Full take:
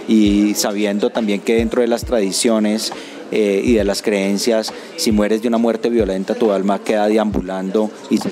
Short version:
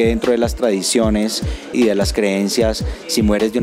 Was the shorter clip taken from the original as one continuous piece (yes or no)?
no